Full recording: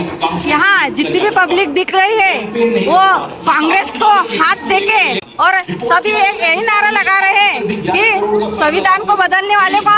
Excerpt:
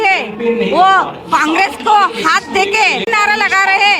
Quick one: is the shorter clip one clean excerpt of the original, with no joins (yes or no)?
no